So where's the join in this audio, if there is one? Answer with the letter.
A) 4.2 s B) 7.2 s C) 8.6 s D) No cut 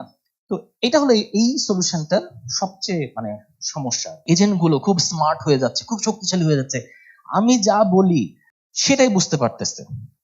A